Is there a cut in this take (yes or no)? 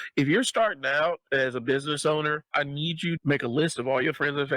yes